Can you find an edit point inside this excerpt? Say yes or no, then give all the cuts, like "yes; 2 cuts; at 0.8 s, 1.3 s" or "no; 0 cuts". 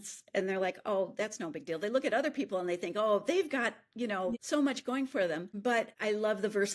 yes; 2 cuts; at 4.4 s, 5.8 s